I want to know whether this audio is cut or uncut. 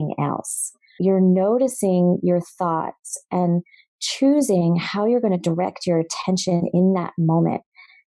cut